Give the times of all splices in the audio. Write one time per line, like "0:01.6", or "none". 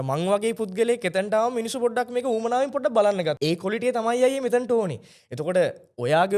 0:03.4